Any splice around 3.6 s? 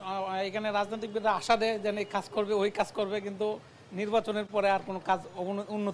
no; 0 cuts

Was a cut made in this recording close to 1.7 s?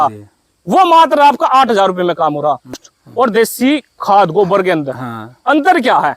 no; 1 cut; at 2.9 s

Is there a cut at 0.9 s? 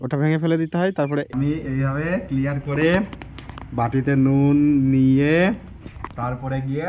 yes; 1 cut; at 0.9 s

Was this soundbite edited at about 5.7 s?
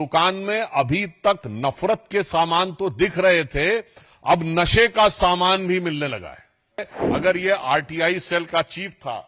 no; 1 cut; at 7.0 s

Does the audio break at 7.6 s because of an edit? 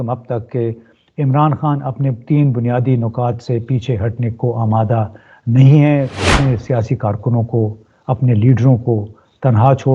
no; 1 cut; at 6.2 s

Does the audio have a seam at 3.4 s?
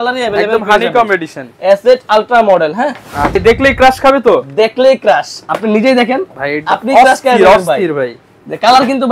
yes; 1 cut; at 3.4 s

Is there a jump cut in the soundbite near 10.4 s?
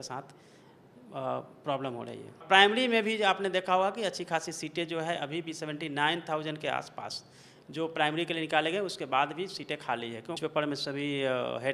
yes; 2 cuts; at 2.4 s, 10.4 s

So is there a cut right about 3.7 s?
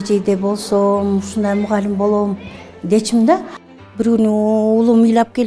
yes; 1 cut; at 3.7 s

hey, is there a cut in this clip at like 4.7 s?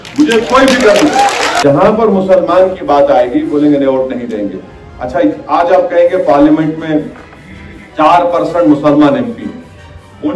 no; 1 cut; at 1.6 s

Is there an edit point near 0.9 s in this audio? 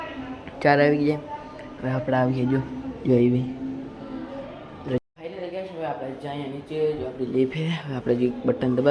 no; 1 cut; at 5.0 s

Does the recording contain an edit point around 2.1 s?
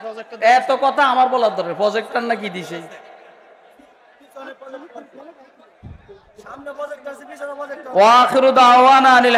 no; 0 cuts

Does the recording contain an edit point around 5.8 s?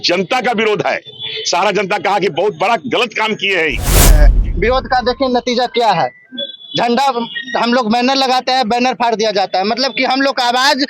no; 1 cut; at 4.2 s

